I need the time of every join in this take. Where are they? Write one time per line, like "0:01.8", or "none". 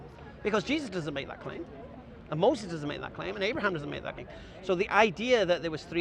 0:04.2